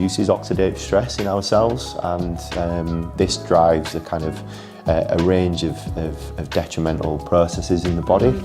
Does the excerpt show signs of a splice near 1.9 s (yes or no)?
no